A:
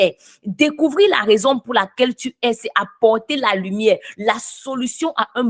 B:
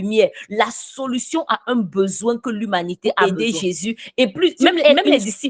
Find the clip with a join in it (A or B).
B